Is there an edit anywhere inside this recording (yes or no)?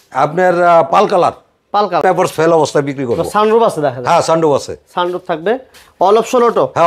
yes